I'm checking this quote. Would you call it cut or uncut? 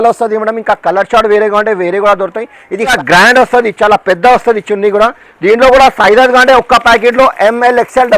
cut